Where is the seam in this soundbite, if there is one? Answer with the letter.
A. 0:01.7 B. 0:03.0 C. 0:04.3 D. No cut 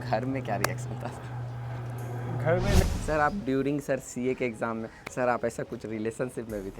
B